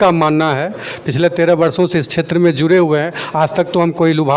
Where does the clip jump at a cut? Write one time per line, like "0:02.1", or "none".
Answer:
none